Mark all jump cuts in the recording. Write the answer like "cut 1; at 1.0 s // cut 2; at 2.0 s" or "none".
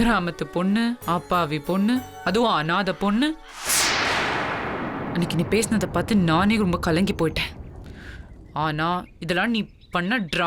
none